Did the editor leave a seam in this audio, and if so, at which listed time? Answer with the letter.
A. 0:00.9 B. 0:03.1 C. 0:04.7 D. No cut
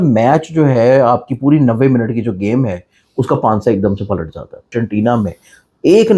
C